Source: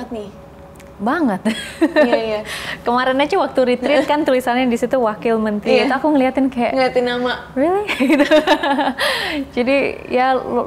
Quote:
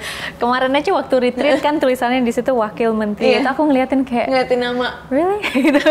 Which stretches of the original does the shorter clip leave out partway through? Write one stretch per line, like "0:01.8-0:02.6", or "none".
none